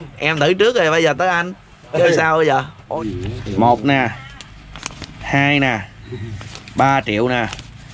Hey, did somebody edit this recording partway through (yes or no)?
yes